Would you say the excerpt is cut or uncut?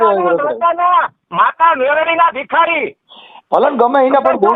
uncut